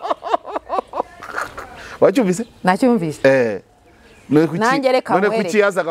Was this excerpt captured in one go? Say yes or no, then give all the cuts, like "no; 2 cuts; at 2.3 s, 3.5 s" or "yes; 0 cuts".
yes; 0 cuts